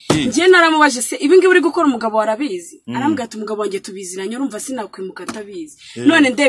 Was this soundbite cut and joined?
no; 0 cuts

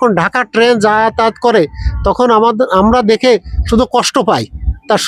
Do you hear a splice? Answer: no; 0 cuts

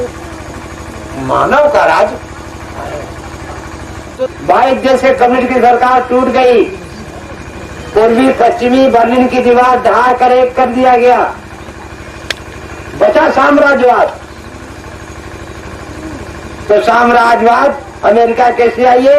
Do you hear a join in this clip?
yes; 1 cut; at 4.1 s

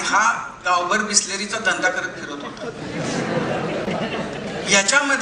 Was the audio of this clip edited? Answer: no; 0 cuts

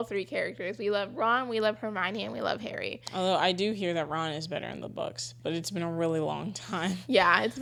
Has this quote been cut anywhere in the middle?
no; 0 cuts

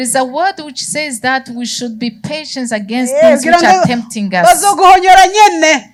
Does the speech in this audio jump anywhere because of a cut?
no; 0 cuts

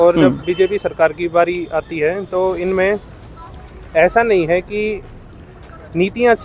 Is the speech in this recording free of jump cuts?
yes; 0 cuts

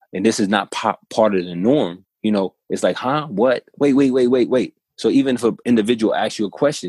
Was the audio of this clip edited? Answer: yes; 1 cut; at 2.0 s

